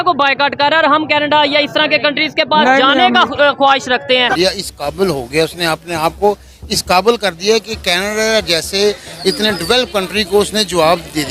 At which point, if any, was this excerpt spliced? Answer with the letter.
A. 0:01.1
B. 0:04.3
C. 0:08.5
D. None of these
B